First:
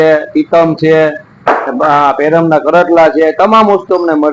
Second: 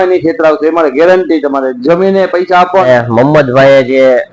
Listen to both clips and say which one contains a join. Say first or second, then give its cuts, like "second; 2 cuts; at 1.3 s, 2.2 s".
second; 1 cut; at 2.9 s